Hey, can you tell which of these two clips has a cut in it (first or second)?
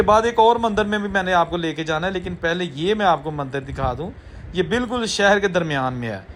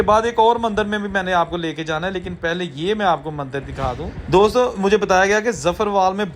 second